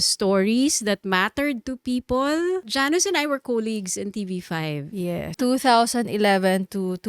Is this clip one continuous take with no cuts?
no; 2 cuts; at 2.7 s, 5.4 s

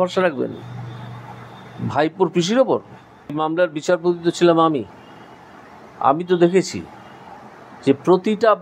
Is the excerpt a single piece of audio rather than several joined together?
no; 1 cut; at 3.3 s

